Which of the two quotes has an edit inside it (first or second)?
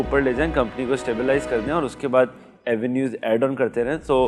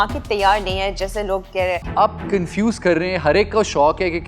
second